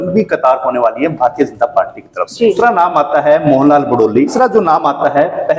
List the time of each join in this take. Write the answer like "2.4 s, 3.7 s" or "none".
2.6 s, 4.3 s